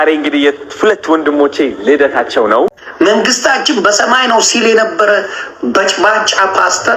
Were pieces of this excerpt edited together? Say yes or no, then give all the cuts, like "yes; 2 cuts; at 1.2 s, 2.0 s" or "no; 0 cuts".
yes; 1 cut; at 2.8 s